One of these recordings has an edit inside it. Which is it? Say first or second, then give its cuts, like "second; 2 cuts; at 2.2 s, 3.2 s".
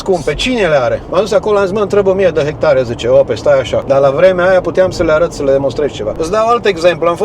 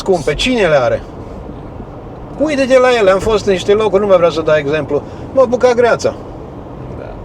first; 3 cuts; at 1.0 s, 3.8 s, 6.1 s